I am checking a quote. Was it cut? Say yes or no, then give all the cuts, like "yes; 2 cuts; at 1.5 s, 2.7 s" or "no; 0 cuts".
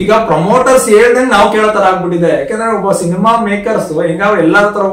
no; 0 cuts